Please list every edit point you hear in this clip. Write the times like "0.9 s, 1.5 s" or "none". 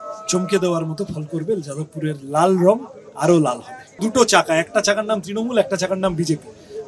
4.0 s